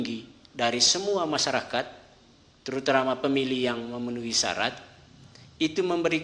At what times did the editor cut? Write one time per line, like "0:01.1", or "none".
none